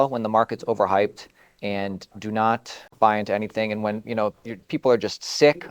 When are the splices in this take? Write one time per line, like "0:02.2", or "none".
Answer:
0:02.9